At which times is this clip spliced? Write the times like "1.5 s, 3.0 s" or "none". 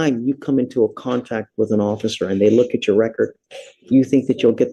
none

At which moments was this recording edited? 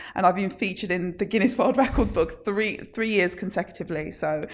none

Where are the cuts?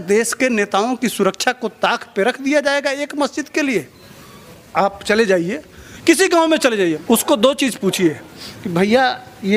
4.6 s, 7.0 s

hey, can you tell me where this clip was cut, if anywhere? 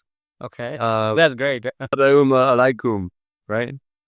none

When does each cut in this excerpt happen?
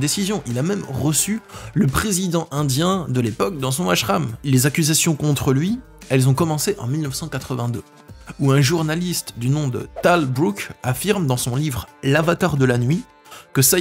4.4 s

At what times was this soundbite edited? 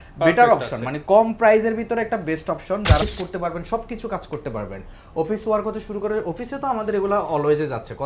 3.0 s

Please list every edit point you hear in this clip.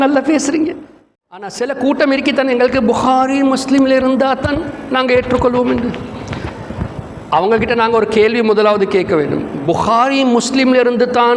1.5 s

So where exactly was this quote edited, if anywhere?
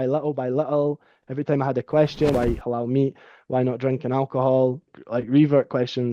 2.3 s, 4.9 s

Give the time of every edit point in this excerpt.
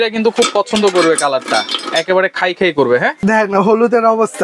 3.2 s

